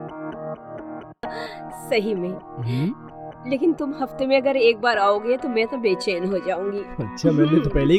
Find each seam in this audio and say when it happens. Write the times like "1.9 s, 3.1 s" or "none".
none